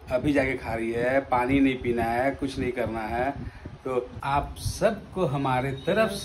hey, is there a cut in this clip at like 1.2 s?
no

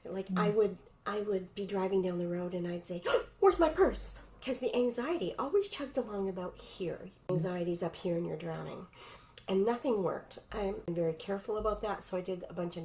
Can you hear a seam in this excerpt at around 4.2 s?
no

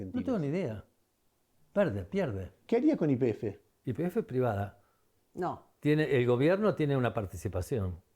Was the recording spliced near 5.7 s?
no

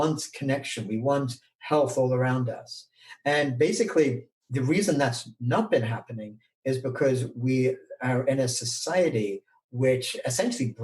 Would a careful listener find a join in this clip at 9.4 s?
no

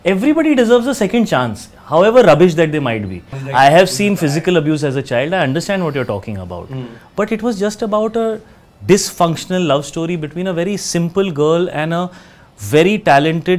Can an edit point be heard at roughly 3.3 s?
yes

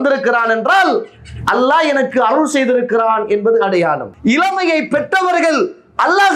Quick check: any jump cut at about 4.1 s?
yes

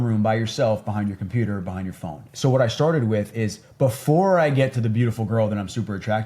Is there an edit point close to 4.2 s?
no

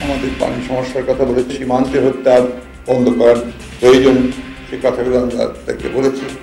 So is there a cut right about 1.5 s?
yes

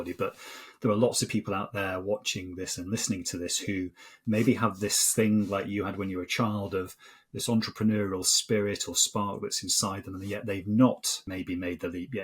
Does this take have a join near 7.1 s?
no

